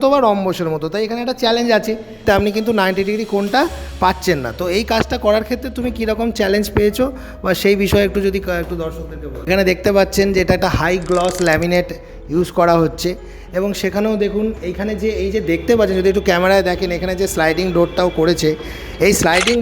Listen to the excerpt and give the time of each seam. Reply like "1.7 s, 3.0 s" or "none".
2.2 s, 9.5 s